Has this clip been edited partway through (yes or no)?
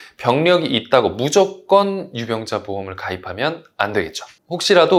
no